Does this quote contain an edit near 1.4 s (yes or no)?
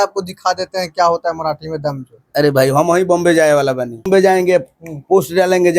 no